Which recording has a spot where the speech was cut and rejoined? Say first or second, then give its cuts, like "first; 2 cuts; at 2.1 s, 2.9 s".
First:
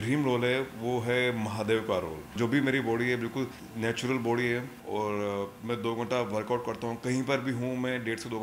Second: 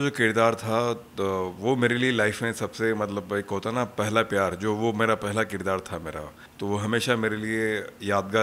first; 1 cut; at 2.3 s